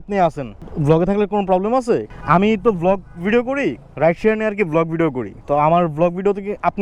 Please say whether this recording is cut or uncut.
uncut